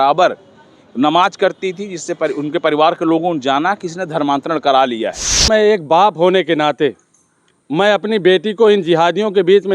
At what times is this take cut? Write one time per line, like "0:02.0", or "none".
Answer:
0:05.5